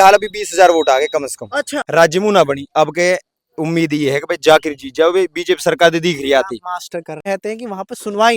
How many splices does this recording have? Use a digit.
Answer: 2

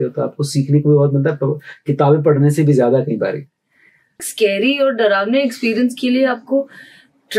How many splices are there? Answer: 1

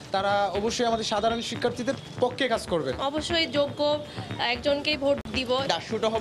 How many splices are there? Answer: 2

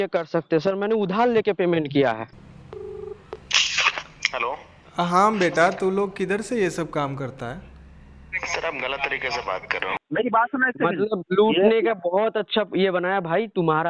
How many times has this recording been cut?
2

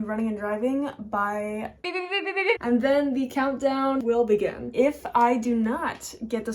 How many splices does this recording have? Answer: 2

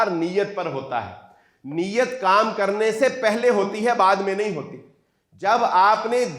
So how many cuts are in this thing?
0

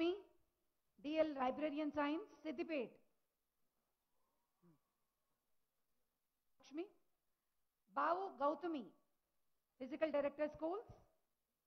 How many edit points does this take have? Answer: 1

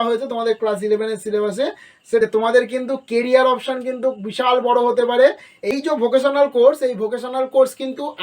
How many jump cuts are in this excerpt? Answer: 2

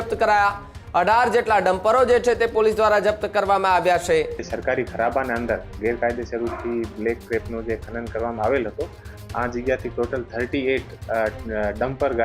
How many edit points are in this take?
1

